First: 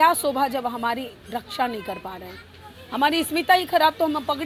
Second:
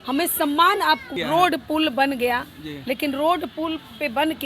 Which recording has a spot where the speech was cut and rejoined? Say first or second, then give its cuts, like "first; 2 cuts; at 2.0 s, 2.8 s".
second; 1 cut; at 1.1 s